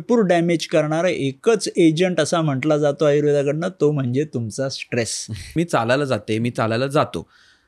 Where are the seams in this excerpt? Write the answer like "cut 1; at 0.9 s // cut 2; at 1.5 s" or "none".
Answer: cut 1; at 5.5 s